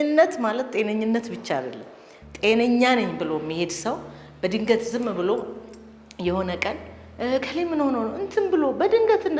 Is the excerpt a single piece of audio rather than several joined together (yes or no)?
yes